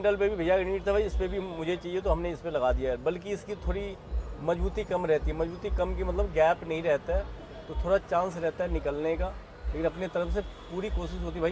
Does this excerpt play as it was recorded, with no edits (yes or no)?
yes